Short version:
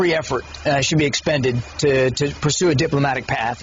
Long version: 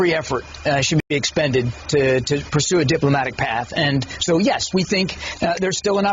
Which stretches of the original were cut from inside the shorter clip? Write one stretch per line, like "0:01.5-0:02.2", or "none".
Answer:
0:01.0-0:01.1